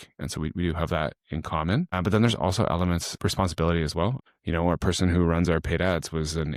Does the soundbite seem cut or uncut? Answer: cut